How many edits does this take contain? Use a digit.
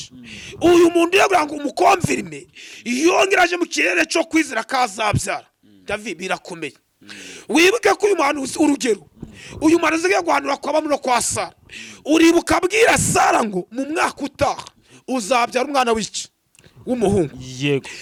0